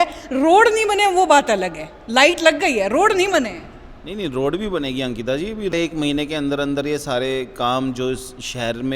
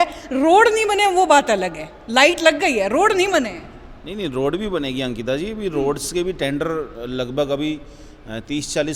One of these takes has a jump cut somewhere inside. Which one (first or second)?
first